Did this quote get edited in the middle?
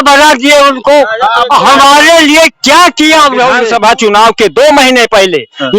yes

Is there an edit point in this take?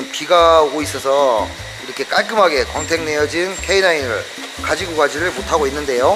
yes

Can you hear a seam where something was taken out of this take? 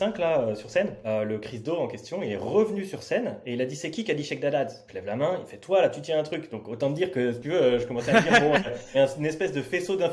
yes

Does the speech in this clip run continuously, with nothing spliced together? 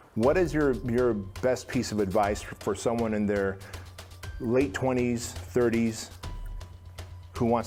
yes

